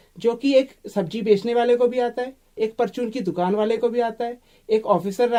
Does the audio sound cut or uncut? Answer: uncut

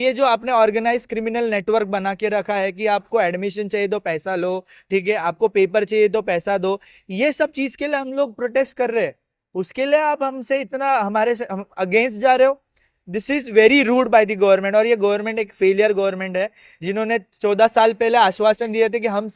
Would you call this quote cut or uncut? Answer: uncut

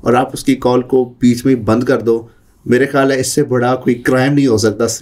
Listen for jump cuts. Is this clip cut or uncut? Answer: uncut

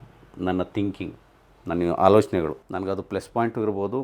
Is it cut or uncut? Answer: cut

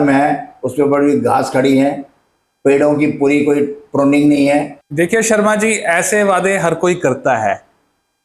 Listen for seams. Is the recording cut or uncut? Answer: cut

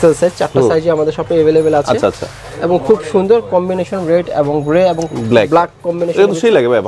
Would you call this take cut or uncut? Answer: uncut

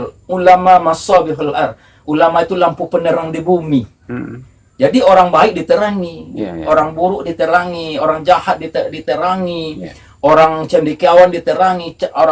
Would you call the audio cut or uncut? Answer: uncut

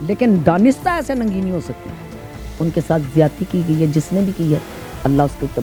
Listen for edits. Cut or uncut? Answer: uncut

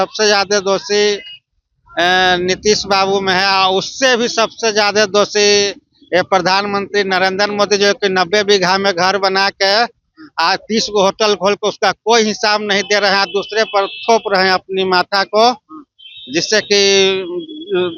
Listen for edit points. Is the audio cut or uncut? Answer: uncut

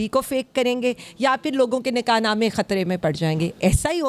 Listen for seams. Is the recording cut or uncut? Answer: uncut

